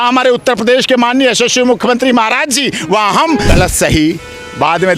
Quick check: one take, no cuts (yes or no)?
no